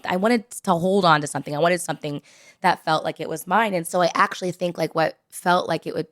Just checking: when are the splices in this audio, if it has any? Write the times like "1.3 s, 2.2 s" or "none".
3.9 s

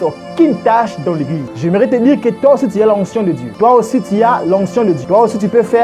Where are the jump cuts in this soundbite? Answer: 1.4 s, 3.5 s, 5.0 s

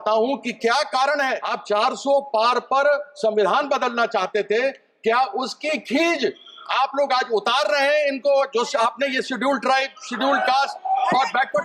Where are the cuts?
1.5 s

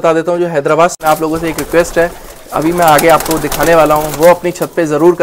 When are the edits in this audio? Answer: 1.0 s

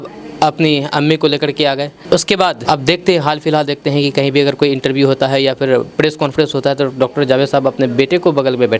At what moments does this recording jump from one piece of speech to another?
none

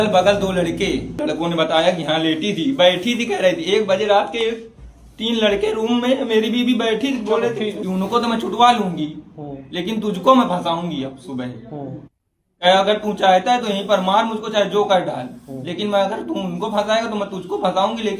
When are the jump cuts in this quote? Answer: 1.2 s, 7.8 s

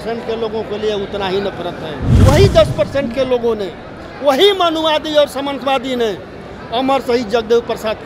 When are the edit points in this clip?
2.1 s

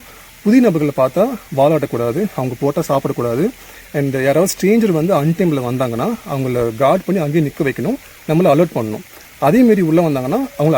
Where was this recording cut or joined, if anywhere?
none

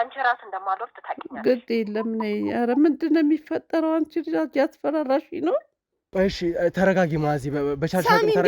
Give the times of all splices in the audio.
6.0 s

